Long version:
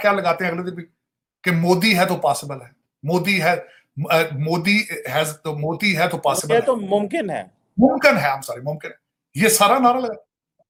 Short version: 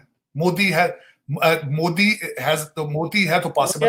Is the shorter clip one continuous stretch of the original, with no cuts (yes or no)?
yes